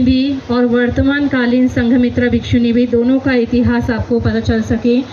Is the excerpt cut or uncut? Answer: uncut